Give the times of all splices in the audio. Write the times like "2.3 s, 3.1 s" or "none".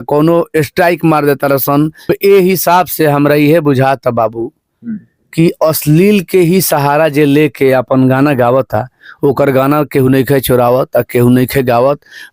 2.1 s

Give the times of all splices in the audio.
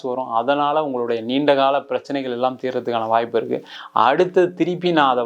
3.7 s

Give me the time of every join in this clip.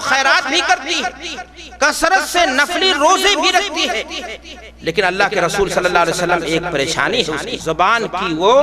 7.5 s

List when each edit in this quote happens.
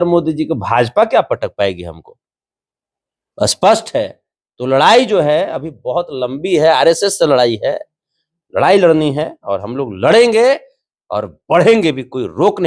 none

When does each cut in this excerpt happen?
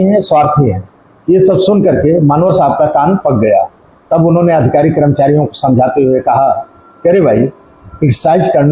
none

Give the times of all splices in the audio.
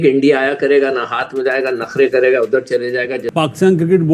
3.2 s

